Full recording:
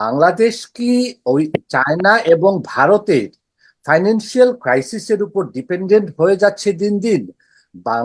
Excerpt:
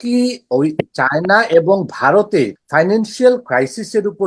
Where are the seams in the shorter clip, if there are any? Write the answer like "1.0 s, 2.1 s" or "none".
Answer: 2.6 s

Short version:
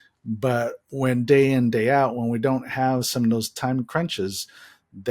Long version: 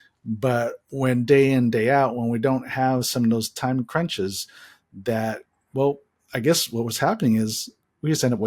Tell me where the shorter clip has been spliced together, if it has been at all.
none

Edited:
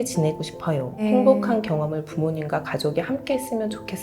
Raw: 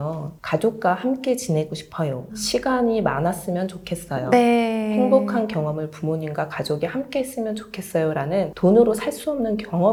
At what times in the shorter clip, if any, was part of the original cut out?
1.0 s

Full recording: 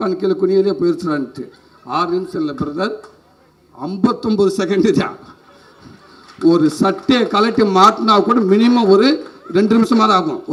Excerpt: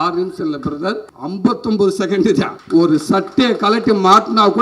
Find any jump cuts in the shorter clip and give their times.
1.1 s, 2.6 s

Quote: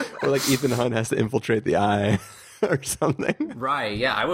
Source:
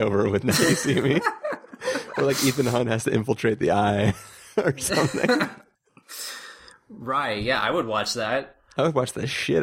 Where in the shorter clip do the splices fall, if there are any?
3.3 s

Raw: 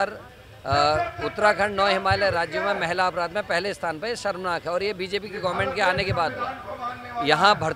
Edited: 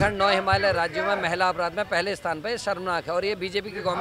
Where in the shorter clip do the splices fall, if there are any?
none

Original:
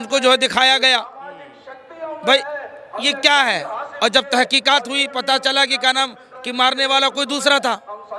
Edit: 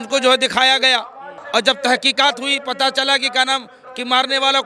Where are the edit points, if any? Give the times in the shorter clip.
1.3 s

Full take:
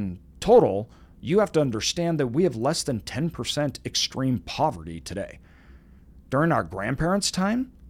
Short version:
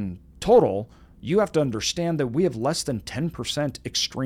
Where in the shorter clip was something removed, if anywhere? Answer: none

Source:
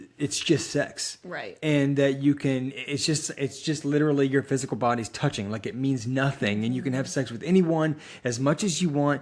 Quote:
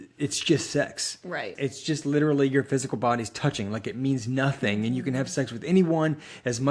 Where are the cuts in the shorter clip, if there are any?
1.5 s

